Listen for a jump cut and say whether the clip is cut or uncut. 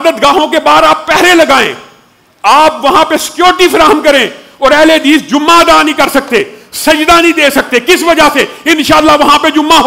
uncut